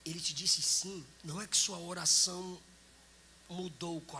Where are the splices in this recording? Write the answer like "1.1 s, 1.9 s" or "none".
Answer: 1.1 s